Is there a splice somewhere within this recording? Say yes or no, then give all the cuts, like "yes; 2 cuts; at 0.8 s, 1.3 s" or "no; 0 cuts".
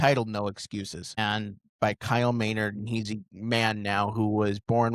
yes; 1 cut; at 1.2 s